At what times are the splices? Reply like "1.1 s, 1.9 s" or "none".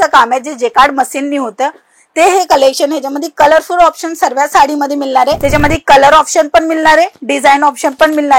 5.4 s